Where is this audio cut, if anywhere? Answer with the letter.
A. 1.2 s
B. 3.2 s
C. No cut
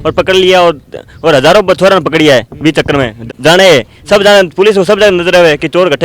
B